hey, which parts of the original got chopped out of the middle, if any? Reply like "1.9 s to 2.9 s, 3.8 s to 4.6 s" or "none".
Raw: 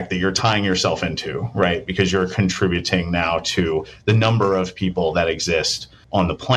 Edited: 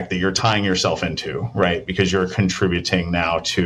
none